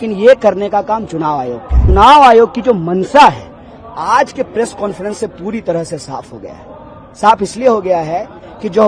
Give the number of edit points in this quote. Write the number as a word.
one